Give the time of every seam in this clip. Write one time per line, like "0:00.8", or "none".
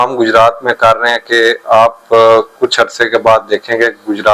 none